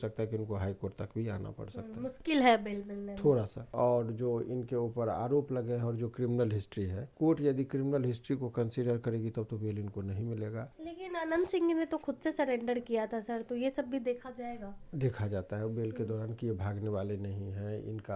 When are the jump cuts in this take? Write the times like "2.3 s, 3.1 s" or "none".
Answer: 3.7 s, 7.0 s, 10.7 s